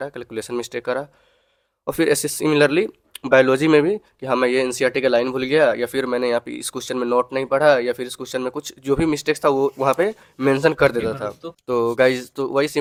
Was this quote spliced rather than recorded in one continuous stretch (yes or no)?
no